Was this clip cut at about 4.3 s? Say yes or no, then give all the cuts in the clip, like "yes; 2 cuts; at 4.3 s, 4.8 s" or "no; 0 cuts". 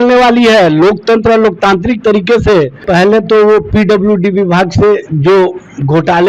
no; 1 cut; at 2.8 s